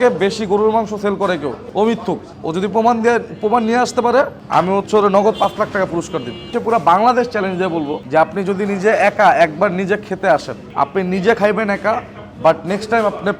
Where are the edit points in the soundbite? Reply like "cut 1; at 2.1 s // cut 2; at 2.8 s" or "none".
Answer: cut 1; at 1.6 s // cut 2; at 2.3 s // cut 3; at 4.4 s // cut 4; at 6.5 s // cut 5; at 8.0 s // cut 6; at 10.6 s